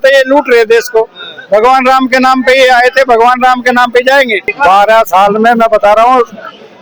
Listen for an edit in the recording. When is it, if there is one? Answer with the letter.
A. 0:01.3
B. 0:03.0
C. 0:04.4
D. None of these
C